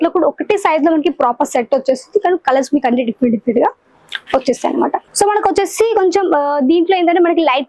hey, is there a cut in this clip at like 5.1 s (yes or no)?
yes